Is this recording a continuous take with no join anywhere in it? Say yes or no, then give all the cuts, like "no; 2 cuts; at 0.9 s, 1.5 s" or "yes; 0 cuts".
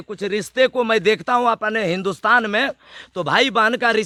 yes; 0 cuts